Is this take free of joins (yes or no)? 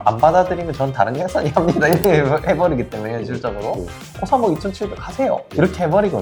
yes